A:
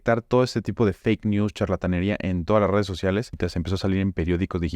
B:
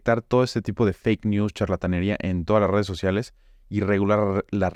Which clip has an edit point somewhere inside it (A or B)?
A